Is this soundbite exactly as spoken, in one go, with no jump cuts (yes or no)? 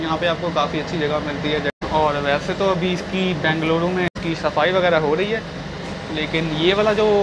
yes